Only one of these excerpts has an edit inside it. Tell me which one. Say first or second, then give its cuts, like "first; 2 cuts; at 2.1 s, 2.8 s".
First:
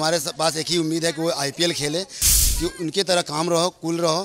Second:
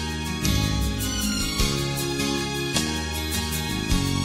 first; 1 cut; at 2.3 s